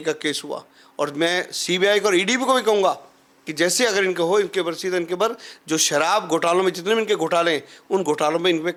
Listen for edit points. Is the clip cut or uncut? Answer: uncut